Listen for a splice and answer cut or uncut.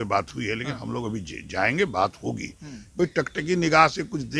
cut